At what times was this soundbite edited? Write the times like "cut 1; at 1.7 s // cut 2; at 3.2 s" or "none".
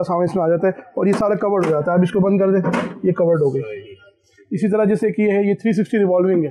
none